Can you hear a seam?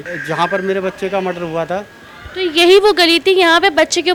no; 0 cuts

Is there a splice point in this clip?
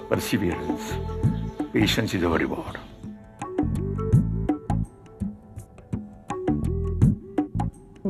yes; 1 cut; at 3.3 s

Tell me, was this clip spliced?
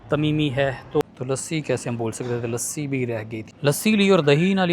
yes; 2 cuts; at 1.0 s, 3.4 s

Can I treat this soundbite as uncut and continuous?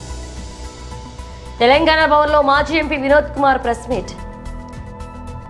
yes; 0 cuts

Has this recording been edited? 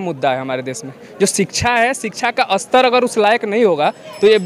no; 0 cuts

